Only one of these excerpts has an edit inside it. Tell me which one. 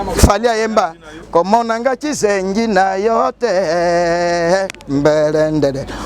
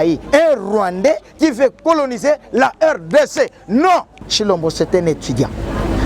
second; 1 cut; at 4.3 s

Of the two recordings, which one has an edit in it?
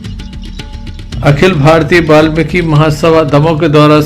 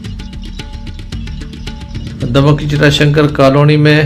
first; 1 cut; at 1.0 s

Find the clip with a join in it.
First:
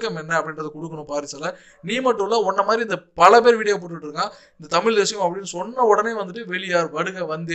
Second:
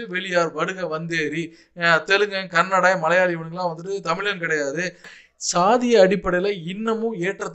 second; 1 cut; at 5.1 s

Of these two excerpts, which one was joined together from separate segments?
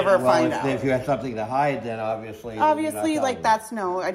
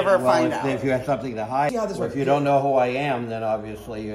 second; 1 cut; at 1.7 s

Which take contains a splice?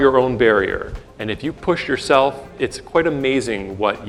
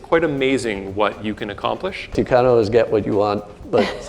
second; 1 cut; at 2.2 s

